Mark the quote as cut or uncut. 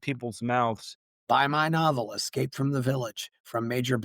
cut